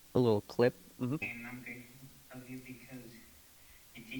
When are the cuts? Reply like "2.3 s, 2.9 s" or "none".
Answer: 1.2 s